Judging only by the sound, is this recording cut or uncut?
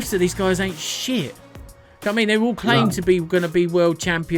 uncut